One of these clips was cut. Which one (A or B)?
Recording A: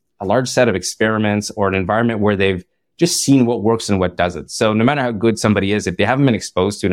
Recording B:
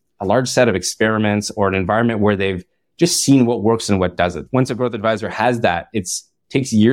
B